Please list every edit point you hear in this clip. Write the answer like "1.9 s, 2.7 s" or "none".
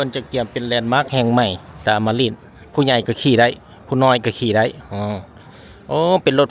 1.7 s